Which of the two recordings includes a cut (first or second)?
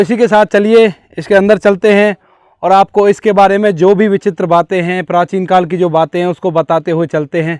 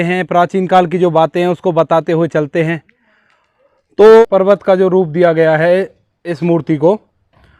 second